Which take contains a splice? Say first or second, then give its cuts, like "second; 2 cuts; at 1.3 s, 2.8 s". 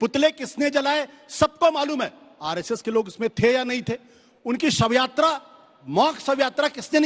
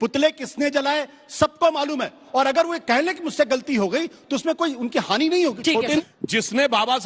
second; 2 cuts; at 2.2 s, 6.0 s